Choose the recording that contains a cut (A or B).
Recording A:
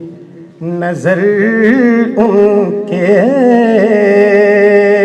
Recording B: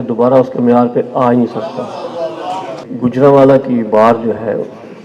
B